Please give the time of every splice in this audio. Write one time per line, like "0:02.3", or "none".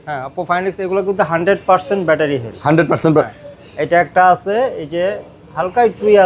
none